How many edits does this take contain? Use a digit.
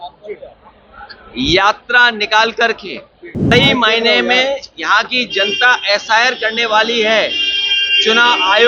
1